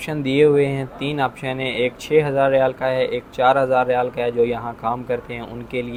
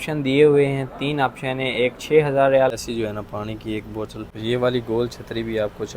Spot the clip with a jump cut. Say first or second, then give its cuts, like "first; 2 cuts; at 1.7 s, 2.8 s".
second; 2 cuts; at 2.8 s, 4.2 s